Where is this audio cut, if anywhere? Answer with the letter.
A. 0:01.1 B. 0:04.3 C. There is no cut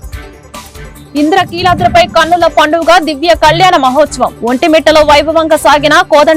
A